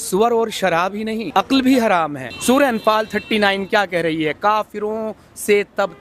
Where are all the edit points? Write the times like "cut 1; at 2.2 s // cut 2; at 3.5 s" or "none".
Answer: cut 1; at 1.2 s // cut 2; at 2.3 s